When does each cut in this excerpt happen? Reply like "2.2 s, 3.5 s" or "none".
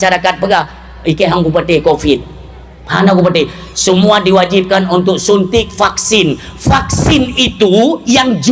none